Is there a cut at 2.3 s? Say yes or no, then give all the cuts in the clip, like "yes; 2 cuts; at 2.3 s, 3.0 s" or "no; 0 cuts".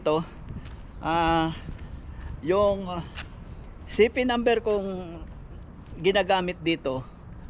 no; 0 cuts